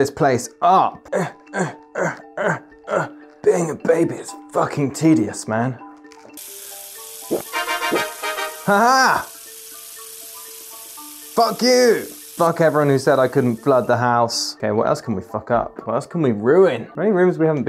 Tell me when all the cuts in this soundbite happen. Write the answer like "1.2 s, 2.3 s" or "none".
none